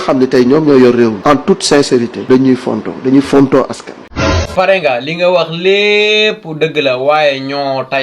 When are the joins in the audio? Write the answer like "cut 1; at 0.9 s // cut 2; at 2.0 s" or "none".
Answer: cut 1; at 1.2 s // cut 2; at 4.4 s